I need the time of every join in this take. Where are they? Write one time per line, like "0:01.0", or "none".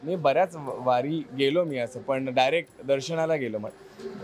none